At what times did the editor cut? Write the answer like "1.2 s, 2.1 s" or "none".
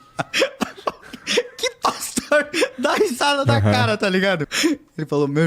4.5 s